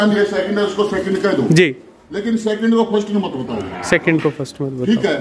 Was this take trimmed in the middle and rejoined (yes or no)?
no